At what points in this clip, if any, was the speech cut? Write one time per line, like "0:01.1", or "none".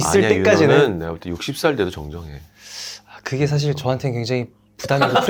none